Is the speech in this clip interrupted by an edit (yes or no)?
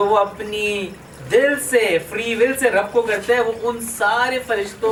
no